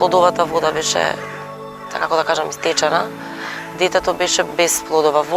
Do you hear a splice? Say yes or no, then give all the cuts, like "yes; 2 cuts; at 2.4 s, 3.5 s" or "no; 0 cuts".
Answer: yes; 1 cut; at 4.5 s